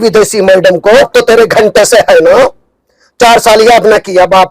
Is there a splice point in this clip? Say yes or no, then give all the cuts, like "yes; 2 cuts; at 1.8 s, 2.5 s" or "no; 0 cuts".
yes; 1 cut; at 1.1 s